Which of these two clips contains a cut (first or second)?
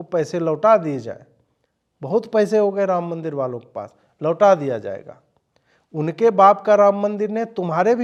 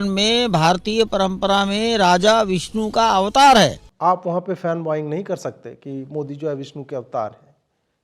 second